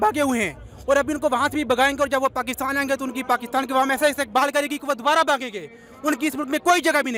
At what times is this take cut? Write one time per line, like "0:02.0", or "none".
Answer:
none

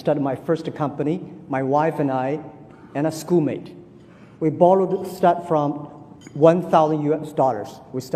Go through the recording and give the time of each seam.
none

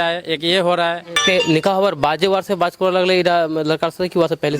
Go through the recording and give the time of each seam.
0:01.1

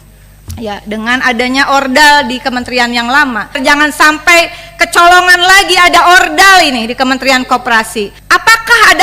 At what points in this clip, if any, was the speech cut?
0:03.6
0:08.2

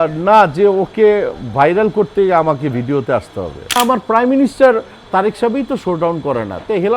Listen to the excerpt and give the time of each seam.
0:03.8

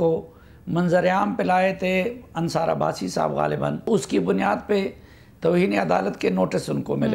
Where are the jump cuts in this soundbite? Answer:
0:03.9

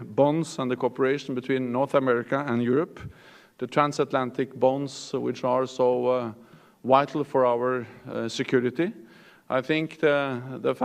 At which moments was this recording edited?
0:07.1

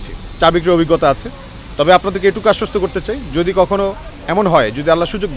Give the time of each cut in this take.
0:04.2

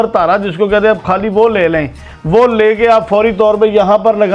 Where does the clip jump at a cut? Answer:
none

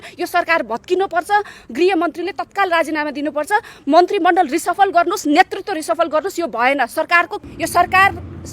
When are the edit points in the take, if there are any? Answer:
0:07.4

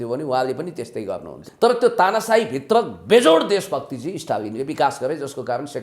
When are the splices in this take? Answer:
0:01.4

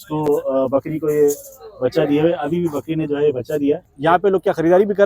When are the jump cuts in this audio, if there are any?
0:03.9

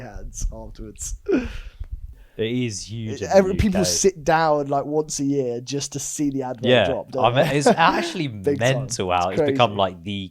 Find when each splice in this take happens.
0:02.1

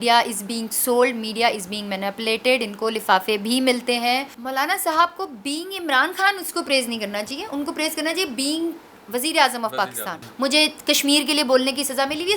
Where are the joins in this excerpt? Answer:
0:04.4
0:10.2

